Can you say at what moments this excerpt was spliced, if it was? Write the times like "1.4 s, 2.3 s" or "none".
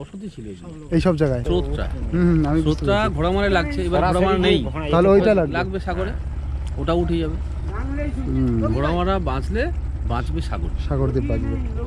1.4 s